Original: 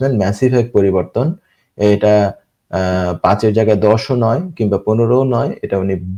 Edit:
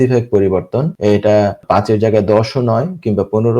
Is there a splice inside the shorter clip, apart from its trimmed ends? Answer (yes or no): yes